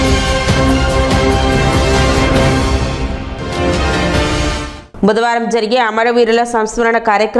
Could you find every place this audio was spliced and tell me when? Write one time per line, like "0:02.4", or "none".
0:04.7